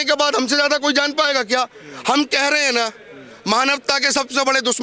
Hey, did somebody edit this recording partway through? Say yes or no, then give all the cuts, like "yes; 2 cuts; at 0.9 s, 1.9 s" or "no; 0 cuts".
no; 0 cuts